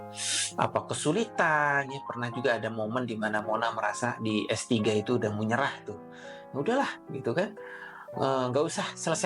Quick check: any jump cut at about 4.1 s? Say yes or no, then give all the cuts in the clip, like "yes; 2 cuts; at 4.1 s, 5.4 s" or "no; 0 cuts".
no; 0 cuts